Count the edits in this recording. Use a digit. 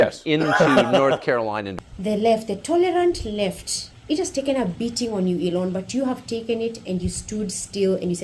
1